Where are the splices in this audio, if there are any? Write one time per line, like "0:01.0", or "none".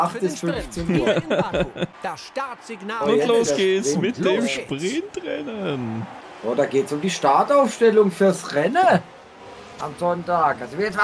0:01.9
0:06.2